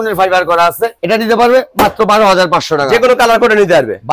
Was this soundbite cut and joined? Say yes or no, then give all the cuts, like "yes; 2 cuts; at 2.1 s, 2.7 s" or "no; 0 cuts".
no; 0 cuts